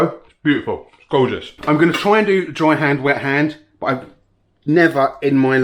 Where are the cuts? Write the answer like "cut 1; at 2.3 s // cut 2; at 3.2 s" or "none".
cut 1; at 1.5 s